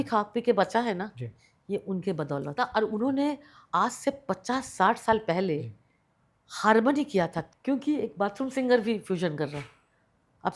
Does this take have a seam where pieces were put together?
yes; 2 cuts; at 2.5 s, 7.4 s

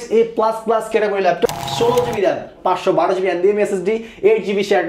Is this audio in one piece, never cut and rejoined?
no; 1 cut; at 1.5 s

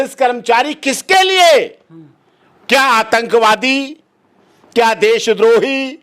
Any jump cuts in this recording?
no; 0 cuts

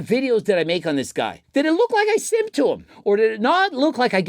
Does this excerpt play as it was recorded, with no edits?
no; 2 cuts; at 1.4 s, 2.9 s

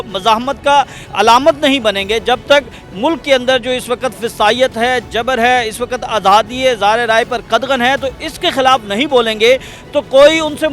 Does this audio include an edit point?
no; 0 cuts

